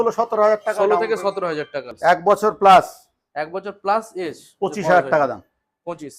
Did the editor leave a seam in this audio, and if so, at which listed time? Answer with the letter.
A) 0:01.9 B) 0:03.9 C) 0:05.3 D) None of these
A